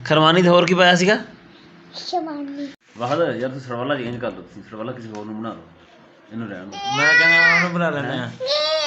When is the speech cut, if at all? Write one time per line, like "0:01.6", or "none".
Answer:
0:02.8